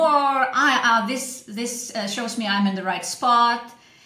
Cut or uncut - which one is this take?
uncut